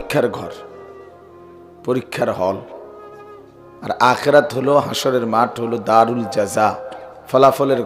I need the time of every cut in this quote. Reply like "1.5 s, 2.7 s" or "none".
none

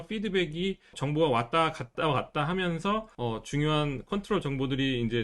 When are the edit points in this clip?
1.0 s, 1.9 s, 3.1 s

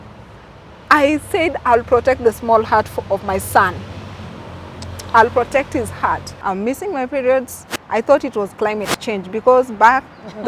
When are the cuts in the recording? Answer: 6.3 s

